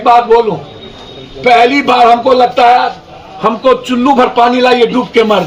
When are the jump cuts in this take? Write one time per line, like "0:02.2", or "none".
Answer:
none